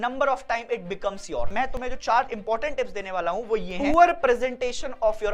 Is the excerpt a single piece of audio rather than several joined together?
no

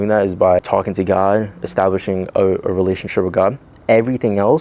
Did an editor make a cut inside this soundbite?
no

